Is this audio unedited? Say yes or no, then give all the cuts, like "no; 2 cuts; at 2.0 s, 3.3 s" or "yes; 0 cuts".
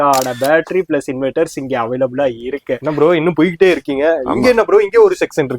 no; 1 cut; at 2.8 s